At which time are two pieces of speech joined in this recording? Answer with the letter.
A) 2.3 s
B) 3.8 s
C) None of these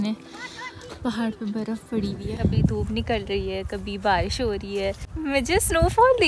A